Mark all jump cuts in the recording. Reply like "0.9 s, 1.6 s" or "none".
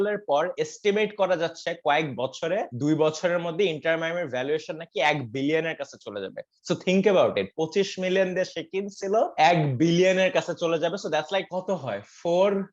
none

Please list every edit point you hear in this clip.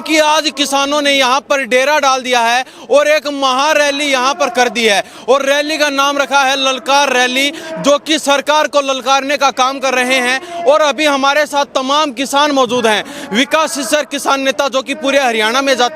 none

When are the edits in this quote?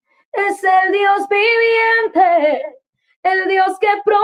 none

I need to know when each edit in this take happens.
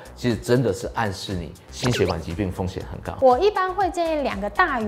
3.1 s

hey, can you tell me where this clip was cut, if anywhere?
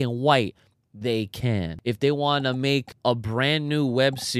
1.7 s, 2.9 s

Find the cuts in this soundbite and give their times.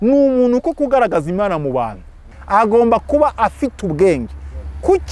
2.3 s

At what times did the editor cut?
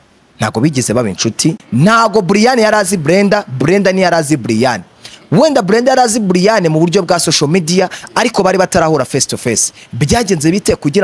1.6 s

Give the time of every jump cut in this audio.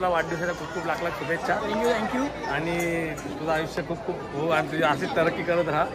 none

